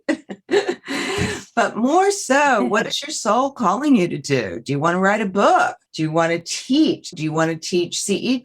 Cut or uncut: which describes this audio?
cut